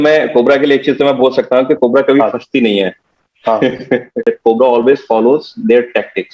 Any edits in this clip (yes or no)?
yes